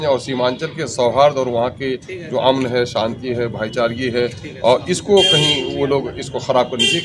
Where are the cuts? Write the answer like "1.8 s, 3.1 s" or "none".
none